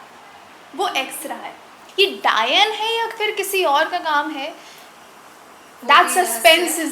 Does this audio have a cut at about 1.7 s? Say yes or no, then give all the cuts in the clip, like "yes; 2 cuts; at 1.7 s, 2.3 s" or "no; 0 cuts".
yes; 1 cut; at 1.7 s